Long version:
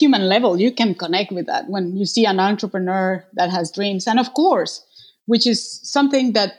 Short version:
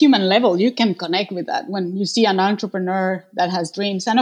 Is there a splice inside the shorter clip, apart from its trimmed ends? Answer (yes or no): no